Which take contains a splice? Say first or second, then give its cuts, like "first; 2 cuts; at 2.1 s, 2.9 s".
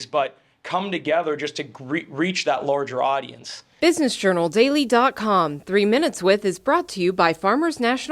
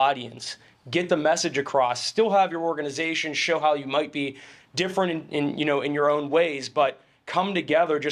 first; 1 cut; at 3.6 s